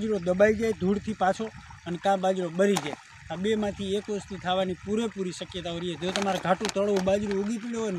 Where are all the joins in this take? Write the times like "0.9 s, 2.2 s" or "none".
none